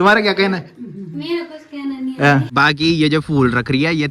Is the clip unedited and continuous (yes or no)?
no